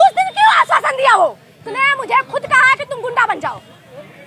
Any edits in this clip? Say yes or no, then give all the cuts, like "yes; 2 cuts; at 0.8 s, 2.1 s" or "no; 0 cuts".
yes; 1 cut; at 1.6 s